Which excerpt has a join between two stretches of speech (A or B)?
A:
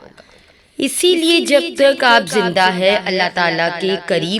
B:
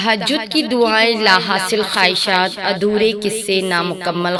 A